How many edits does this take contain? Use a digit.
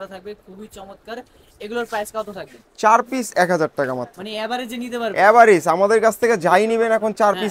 0